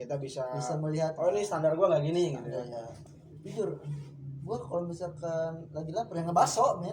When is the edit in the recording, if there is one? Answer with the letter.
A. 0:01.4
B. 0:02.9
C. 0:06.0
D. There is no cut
B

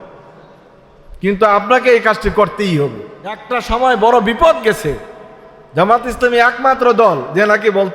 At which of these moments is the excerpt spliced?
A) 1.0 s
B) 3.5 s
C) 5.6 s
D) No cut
B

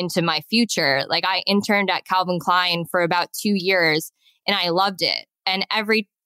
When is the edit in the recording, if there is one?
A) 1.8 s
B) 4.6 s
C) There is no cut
C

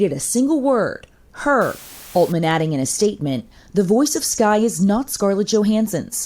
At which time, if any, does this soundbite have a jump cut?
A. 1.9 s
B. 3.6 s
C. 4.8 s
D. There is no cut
A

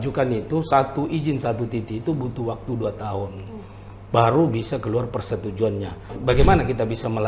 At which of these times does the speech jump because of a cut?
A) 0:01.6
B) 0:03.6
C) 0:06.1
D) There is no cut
C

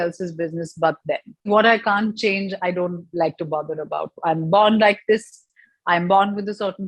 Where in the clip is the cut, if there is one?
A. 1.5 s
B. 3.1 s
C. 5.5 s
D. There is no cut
A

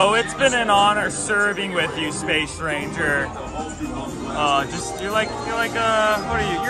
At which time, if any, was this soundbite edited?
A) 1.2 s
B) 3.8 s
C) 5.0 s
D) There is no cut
D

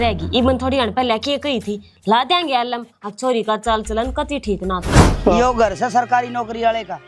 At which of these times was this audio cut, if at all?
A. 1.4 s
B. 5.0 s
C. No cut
B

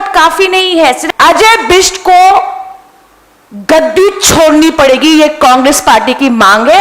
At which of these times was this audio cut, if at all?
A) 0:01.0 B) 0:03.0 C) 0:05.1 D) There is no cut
A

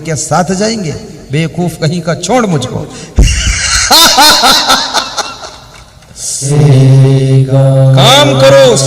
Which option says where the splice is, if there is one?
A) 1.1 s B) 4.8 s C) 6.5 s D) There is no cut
C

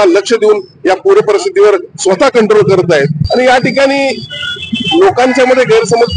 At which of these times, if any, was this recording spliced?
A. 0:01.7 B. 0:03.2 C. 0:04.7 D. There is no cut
B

